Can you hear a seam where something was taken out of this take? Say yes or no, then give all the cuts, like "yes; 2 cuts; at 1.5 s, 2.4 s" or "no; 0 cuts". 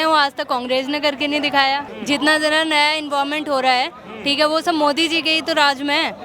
yes; 1 cut; at 1.9 s